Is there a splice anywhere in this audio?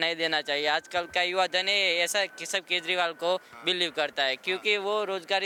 no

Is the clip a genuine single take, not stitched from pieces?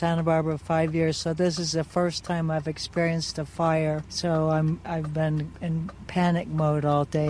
no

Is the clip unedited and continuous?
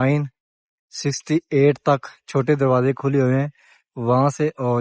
yes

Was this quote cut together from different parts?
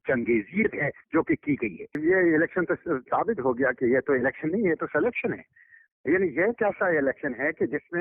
yes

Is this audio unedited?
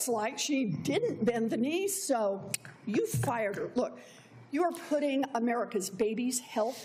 yes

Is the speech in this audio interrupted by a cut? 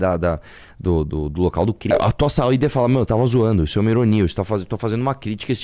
yes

